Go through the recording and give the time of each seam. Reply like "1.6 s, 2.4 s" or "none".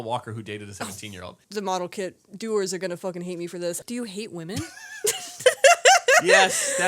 1.4 s, 3.8 s